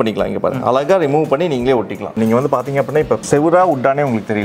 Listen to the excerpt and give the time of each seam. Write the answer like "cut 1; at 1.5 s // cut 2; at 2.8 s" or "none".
cut 1; at 2.2 s // cut 2; at 3.2 s

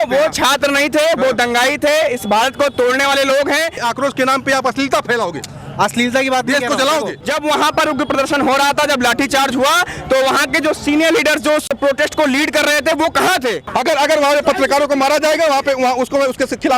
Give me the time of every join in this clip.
cut 1; at 3.8 s // cut 2; at 7.2 s // cut 3; at 11.7 s // cut 4; at 13.6 s

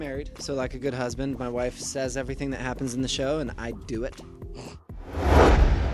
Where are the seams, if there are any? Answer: cut 1; at 5.0 s

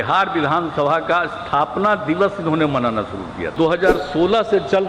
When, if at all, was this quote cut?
cut 1; at 3.5 s

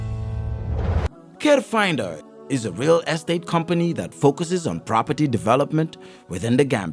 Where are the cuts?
none

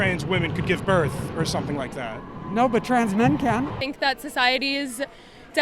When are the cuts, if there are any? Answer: cut 1; at 3.8 s

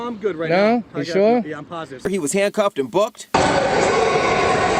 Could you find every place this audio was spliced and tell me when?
cut 1; at 2.0 s

